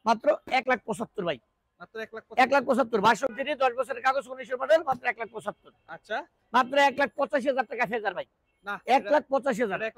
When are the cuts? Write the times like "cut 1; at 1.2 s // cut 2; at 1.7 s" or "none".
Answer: none